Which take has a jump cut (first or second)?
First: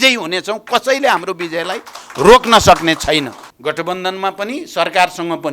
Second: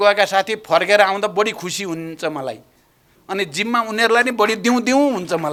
first